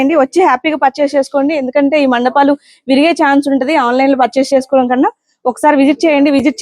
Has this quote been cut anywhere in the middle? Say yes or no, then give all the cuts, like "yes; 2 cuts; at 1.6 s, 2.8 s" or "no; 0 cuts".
no; 0 cuts